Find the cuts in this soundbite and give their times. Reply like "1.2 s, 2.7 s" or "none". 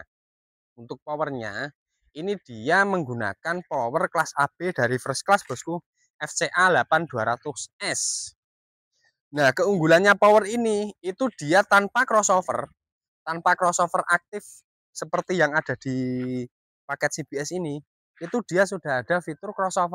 none